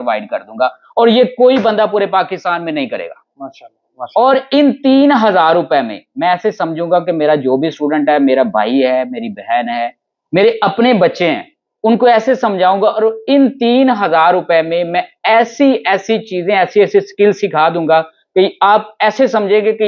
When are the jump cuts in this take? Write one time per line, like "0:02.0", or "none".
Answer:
none